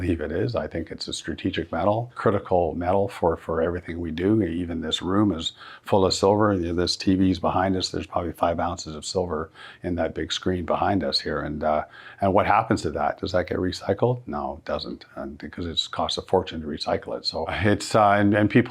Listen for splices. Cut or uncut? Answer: cut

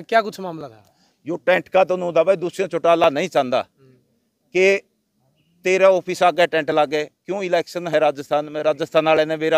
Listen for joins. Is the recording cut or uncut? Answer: uncut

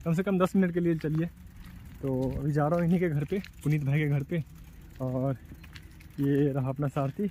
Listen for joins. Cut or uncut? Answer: uncut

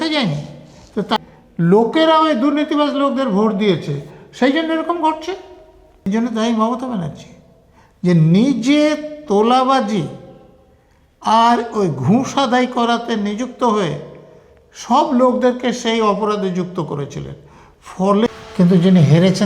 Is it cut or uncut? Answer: cut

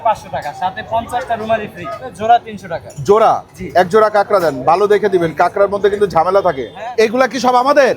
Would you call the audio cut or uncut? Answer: cut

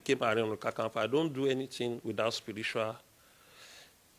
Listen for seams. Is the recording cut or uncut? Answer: uncut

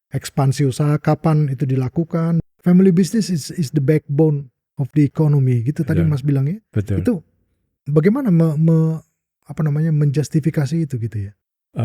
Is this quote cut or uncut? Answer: cut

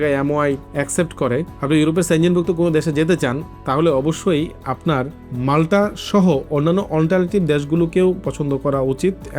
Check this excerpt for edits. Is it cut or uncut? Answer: uncut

